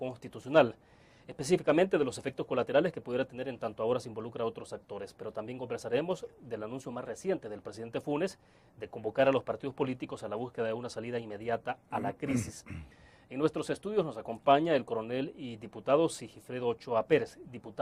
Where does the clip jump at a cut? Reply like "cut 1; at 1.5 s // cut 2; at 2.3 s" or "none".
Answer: cut 1; at 5.5 s